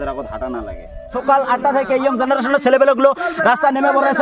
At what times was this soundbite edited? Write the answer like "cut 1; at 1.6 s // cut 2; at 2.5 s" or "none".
cut 1; at 1.2 s

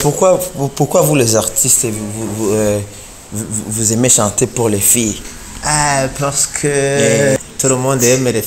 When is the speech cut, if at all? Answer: cut 1; at 7.4 s

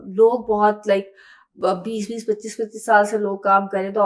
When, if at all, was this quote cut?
none

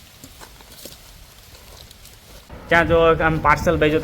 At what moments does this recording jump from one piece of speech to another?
cut 1; at 2.4 s

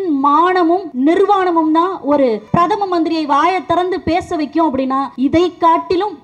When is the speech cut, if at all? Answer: cut 1; at 0.9 s // cut 2; at 2.4 s // cut 3; at 5.1 s

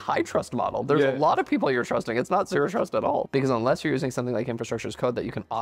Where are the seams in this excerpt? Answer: cut 1; at 3.3 s

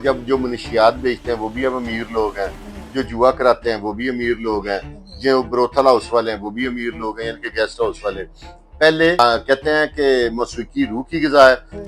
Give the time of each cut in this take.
cut 1; at 9.2 s

